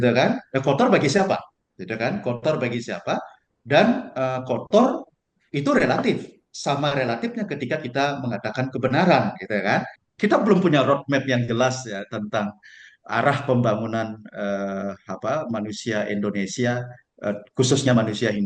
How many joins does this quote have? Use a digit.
1